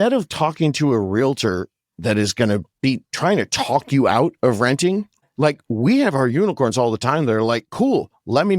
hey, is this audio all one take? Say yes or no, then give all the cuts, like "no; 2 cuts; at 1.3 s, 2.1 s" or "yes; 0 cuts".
no; 2 cuts; at 2.7 s, 5.2 s